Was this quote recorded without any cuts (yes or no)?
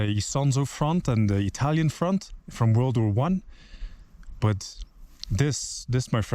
yes